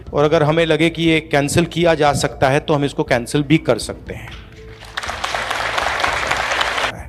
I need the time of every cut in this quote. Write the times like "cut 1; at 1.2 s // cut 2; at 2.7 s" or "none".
none